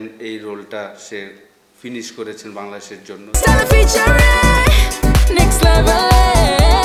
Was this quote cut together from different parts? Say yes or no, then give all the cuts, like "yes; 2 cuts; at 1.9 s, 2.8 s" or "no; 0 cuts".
no; 0 cuts